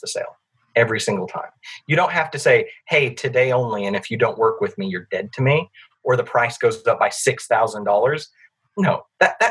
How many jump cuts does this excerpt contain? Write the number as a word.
zero